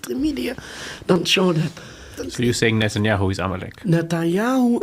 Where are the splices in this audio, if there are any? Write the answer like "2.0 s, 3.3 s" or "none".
2.2 s